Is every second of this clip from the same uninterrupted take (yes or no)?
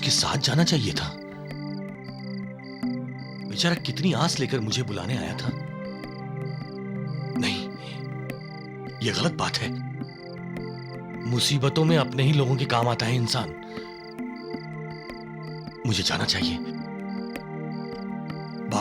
yes